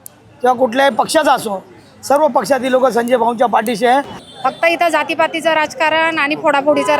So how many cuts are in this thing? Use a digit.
1